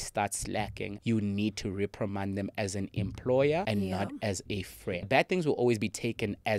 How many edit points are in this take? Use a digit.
3